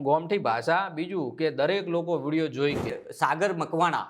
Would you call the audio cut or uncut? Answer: cut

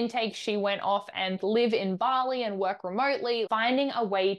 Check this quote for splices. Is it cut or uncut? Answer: cut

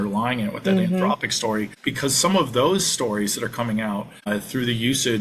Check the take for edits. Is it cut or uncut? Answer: cut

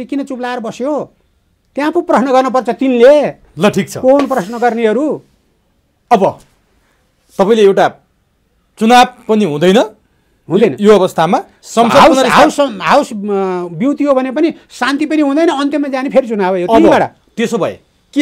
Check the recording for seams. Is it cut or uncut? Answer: uncut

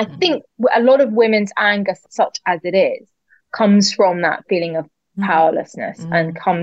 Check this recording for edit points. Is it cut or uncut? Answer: cut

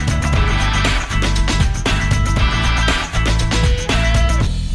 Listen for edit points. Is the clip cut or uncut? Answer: uncut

